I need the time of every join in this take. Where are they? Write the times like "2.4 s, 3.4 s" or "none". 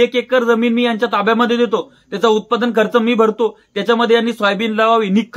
none